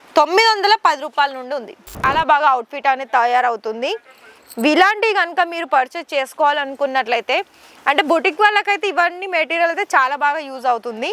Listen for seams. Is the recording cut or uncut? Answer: cut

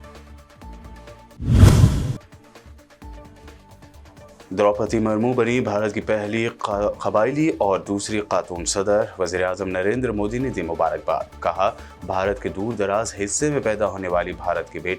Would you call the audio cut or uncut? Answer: cut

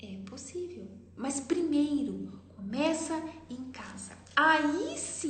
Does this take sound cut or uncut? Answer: cut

